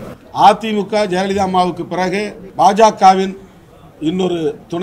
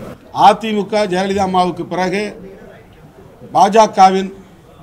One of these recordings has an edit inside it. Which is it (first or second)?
first